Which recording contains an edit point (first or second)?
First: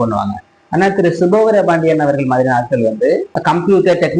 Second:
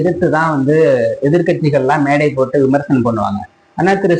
first